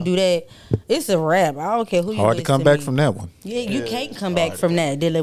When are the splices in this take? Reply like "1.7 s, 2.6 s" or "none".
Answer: none

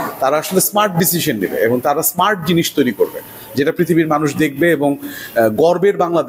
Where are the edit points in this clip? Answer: none

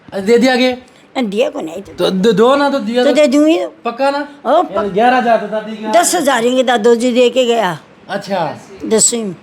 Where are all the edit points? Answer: none

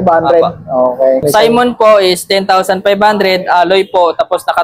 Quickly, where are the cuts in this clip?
1.2 s

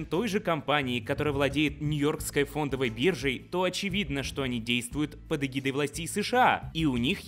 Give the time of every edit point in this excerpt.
none

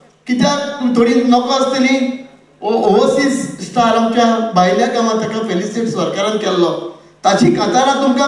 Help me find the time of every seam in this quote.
none

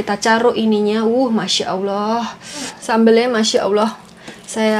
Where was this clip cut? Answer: 2.8 s

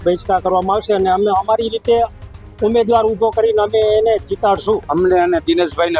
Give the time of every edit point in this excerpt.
4.8 s

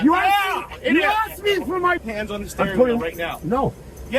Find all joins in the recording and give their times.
2.0 s

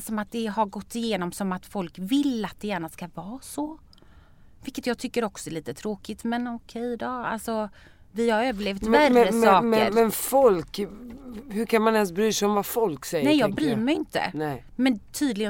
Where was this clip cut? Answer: none

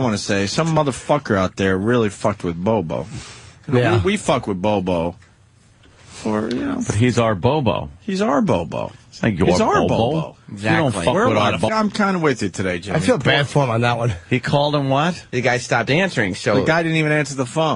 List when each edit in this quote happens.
none

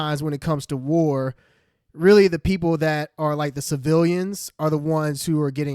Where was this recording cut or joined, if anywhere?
none

